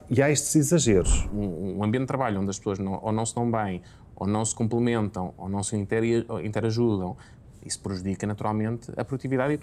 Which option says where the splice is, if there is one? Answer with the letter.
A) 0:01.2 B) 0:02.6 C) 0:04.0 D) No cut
A